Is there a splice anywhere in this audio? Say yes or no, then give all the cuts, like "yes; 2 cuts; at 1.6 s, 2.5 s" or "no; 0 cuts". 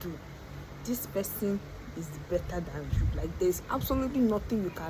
no; 0 cuts